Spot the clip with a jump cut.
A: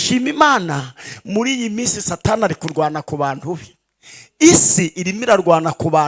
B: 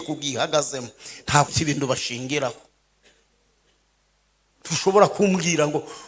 B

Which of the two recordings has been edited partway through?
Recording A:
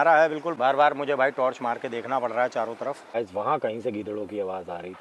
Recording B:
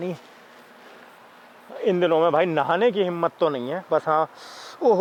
A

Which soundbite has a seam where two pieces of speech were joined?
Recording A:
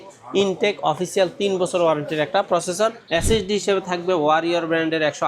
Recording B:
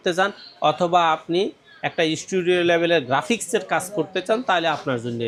A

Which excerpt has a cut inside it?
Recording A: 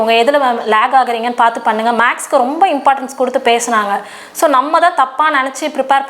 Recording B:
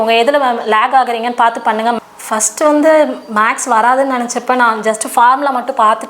B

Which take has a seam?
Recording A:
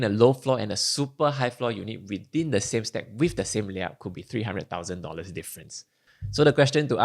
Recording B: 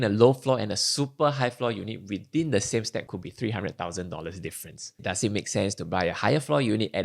B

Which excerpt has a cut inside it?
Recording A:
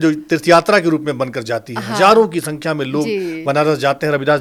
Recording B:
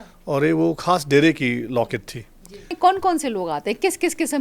B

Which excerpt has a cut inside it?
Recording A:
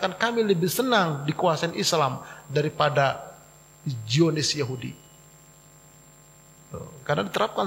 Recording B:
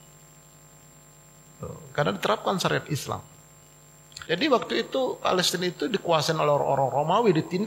B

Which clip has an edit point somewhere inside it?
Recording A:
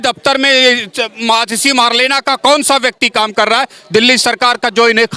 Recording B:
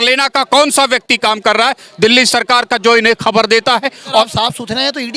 B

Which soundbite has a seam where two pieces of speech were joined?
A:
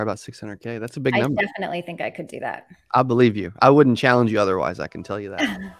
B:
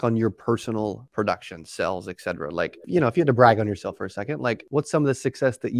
B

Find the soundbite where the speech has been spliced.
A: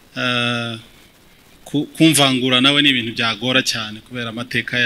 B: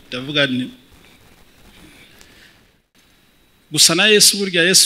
B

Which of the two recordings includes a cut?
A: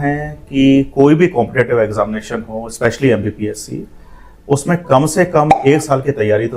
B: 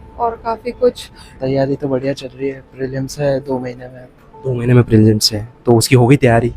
B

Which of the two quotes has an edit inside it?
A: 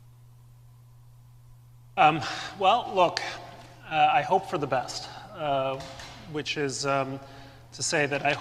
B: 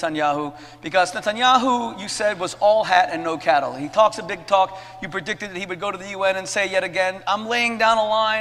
A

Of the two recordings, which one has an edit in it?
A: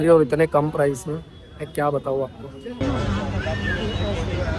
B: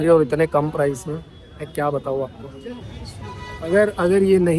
B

